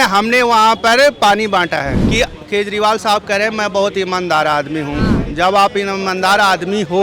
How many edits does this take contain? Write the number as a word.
one